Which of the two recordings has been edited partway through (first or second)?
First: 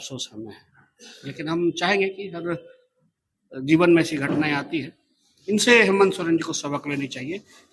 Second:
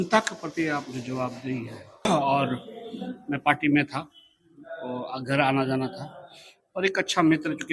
second